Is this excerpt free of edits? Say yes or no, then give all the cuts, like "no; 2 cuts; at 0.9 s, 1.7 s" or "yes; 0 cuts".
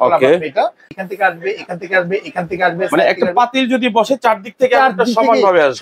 no; 1 cut; at 0.9 s